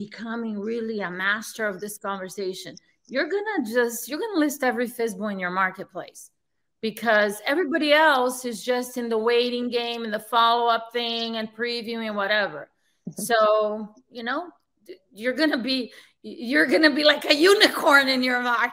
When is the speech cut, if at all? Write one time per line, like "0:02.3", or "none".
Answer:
none